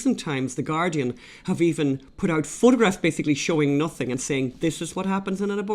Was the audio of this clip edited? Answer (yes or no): yes